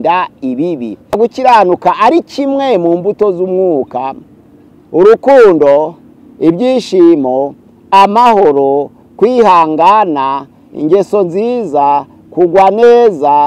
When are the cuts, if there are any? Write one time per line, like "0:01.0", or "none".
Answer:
0:01.2